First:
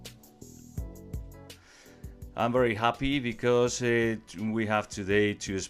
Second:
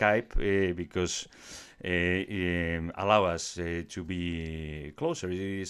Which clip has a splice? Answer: first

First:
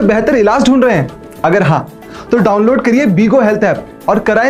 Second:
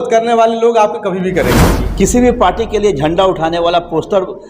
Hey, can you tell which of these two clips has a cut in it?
second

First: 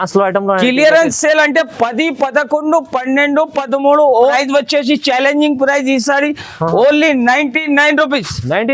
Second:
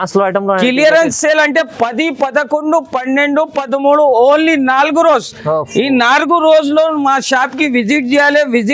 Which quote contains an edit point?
first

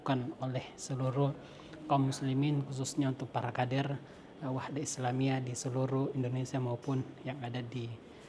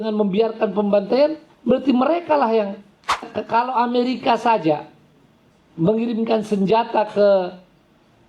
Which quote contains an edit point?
second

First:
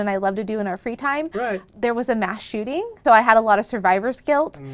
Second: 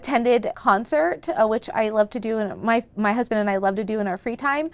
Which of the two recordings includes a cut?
first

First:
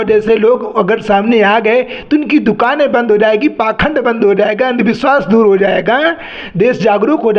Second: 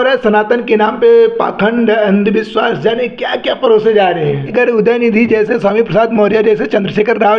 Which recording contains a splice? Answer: second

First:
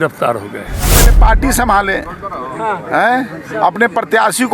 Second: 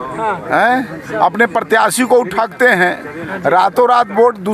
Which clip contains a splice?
first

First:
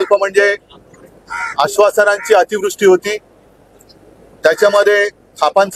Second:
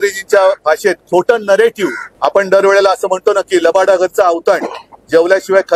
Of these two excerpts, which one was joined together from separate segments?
second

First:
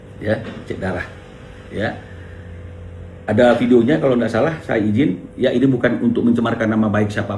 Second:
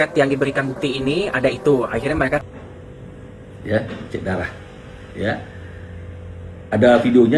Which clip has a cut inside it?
second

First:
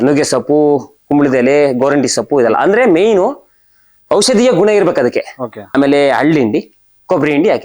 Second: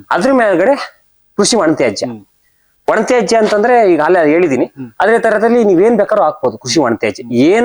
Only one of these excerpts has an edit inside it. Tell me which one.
first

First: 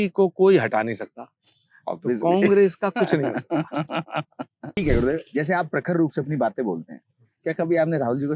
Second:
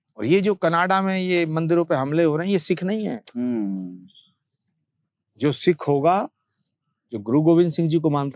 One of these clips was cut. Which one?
first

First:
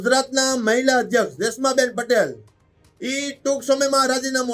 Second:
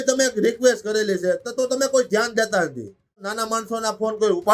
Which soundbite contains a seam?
second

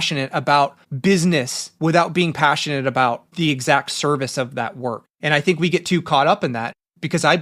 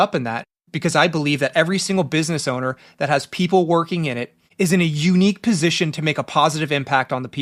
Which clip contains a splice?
first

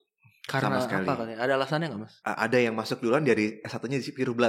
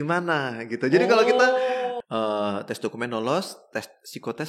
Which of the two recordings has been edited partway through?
second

